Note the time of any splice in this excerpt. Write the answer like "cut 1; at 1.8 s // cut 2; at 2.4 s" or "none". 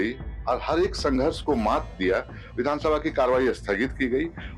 cut 1; at 2.4 s